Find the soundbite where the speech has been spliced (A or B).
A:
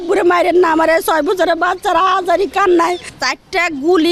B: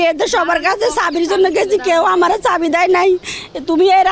A